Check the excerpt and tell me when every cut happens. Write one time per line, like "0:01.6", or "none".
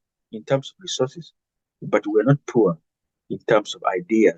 none